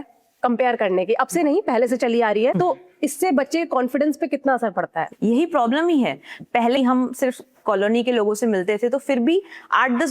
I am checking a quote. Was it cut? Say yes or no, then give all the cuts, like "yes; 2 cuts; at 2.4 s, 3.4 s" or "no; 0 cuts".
yes; 3 cuts; at 2.5 s, 5.0 s, 6.8 s